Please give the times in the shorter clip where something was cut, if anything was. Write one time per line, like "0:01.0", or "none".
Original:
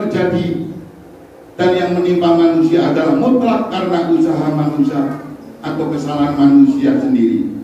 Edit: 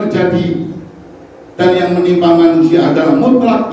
none